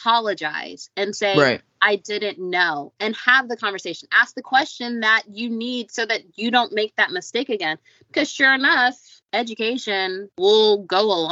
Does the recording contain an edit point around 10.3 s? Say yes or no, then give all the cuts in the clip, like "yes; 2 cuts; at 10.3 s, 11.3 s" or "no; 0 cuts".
yes; 2 cuts; at 9.1 s, 10.3 s